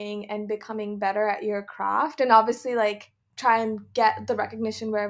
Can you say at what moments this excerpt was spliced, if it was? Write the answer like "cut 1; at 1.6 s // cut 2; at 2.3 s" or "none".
cut 1; at 3.2 s